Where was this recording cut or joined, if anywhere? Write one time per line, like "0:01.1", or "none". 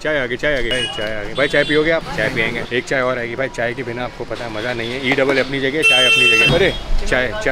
0:02.6
0:06.5